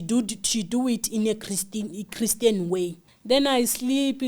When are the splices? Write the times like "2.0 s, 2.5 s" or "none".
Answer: 3.1 s